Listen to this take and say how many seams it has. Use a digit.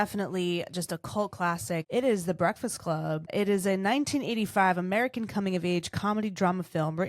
2